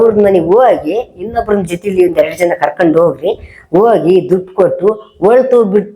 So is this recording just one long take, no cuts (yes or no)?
yes